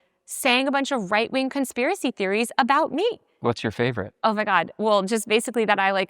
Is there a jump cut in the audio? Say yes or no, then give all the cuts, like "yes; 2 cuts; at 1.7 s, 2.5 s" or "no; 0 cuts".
yes; 1 cut; at 3.3 s